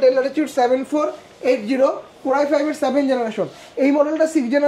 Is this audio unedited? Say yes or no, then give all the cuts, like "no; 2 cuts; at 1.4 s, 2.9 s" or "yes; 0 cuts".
yes; 0 cuts